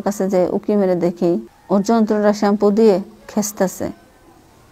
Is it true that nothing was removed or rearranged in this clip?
no; 1 cut; at 1.5 s

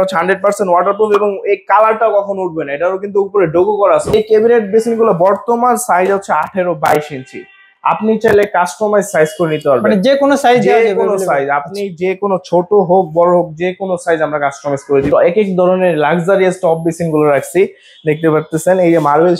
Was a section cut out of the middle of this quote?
yes; 2 cuts; at 4.1 s, 15.1 s

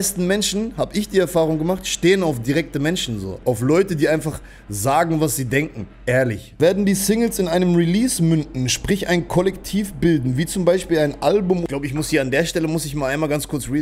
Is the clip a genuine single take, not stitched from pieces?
no; 3 cuts; at 3.3 s, 6.6 s, 11.6 s

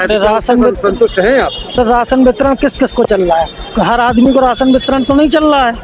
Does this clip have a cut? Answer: no; 0 cuts

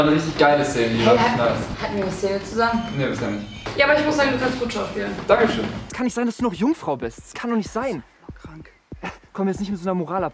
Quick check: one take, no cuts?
no; 1 cut; at 5.9 s

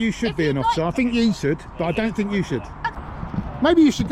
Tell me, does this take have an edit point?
yes; 1 cut; at 2.9 s

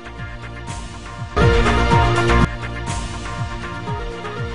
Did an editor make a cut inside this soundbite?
no; 0 cuts

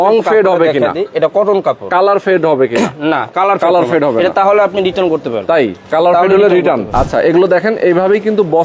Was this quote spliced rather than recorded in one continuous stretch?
yes; 1 cut; at 6.9 s

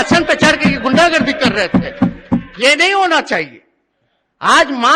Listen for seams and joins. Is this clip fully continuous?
yes; 0 cuts

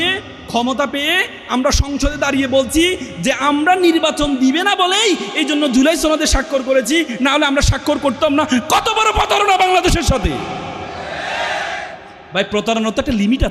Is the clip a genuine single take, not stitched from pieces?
yes; 0 cuts

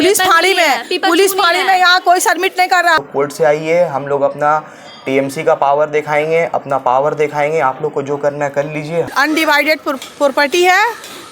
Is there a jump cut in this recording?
yes; 2 cuts; at 3.0 s, 9.1 s

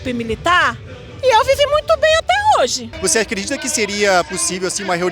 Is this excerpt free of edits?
no; 1 cut; at 2.9 s

